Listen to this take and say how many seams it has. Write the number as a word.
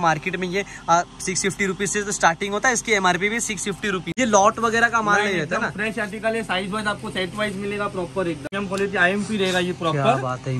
two